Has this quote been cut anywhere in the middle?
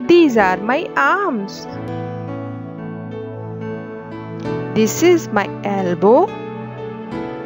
no; 0 cuts

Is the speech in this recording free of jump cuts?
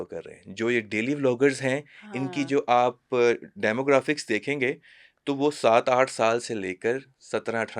yes; 0 cuts

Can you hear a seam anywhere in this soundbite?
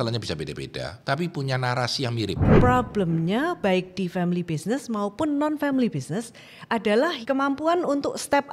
yes; 3 cuts; at 0.9 s, 2.6 s, 7.2 s

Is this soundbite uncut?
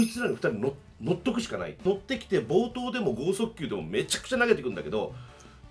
no; 1 cut; at 1.8 s

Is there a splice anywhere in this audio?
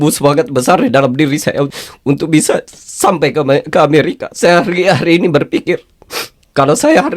yes; 2 cuts; at 1.8 s, 4.2 s

